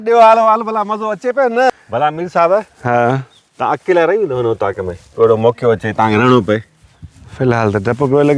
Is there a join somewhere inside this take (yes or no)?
yes